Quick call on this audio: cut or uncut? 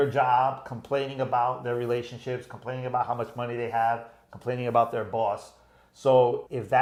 uncut